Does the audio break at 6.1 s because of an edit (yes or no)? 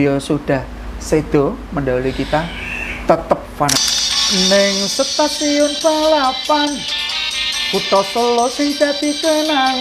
no